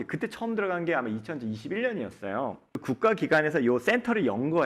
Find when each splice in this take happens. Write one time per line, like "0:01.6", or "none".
0:02.7